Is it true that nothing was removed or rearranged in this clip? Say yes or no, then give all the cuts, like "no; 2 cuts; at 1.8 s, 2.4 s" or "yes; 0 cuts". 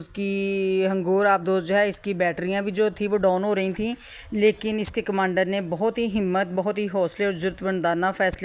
yes; 0 cuts